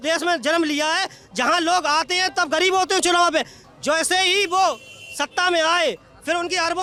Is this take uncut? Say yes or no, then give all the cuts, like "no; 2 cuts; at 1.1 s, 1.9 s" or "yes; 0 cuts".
yes; 0 cuts